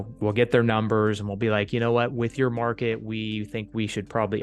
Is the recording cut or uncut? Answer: uncut